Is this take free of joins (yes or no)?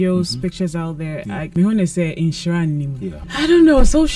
no